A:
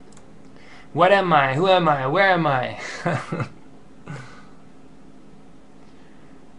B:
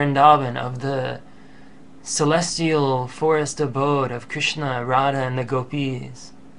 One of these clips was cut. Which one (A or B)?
A